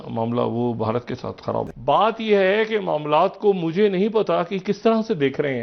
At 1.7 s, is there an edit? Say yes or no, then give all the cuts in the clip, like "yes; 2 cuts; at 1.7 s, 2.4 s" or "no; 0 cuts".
yes; 1 cut; at 1.7 s